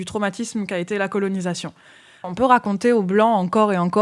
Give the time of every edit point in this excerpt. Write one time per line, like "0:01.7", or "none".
0:02.3